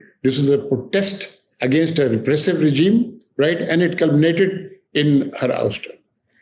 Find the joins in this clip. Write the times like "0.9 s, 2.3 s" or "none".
none